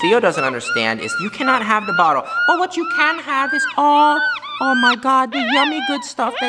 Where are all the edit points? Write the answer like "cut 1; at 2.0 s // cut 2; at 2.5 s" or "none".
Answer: none